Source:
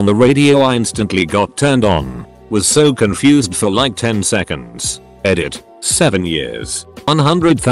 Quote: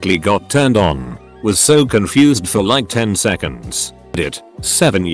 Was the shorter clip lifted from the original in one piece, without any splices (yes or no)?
no